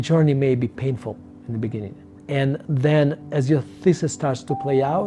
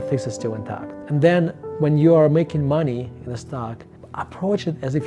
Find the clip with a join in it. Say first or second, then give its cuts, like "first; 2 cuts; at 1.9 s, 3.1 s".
second; 2 cuts; at 0.9 s, 3.4 s